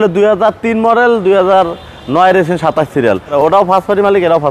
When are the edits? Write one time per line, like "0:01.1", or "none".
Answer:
0:03.3

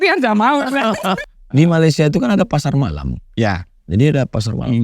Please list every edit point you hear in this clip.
0:01.3

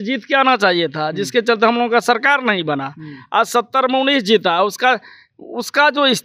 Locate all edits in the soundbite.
none

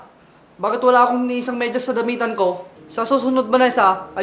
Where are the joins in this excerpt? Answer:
0:02.8

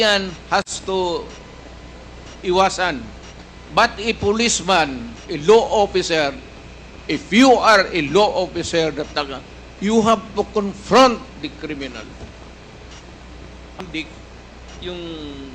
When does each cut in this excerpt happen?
0:13.8

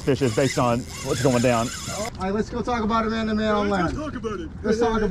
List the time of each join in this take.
0:02.0

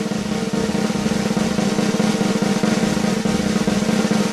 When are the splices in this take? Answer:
none

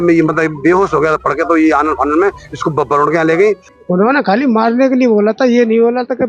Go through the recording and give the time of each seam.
0:03.7

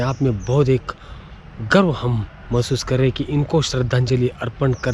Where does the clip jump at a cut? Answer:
none

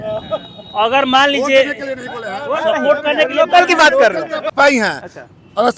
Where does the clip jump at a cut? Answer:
0:04.5

